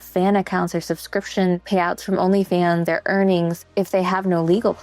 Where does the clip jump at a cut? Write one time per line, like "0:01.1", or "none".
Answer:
0:01.6
0:02.8
0:03.7